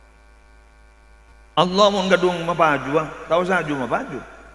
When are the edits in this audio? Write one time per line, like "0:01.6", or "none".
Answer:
0:01.3

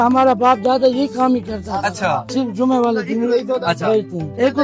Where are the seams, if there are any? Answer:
0:02.3

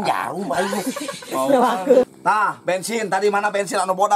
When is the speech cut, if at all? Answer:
0:02.1

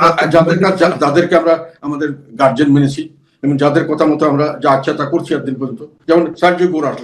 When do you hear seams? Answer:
0:05.9

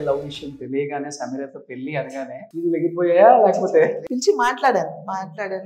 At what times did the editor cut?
0:02.5
0:04.0

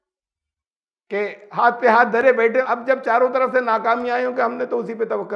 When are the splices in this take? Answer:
0:02.7

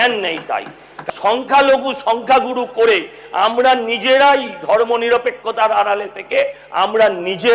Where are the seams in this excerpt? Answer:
0:00.9

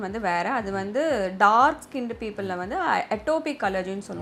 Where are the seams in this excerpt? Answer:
none

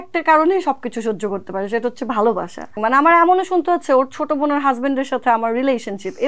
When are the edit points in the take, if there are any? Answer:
0:02.8

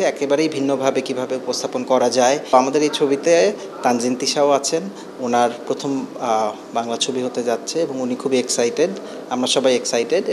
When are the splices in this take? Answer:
0:02.5

